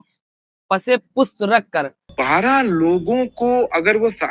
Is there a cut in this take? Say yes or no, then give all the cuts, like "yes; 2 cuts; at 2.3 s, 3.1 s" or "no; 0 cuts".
yes; 1 cut; at 2.1 s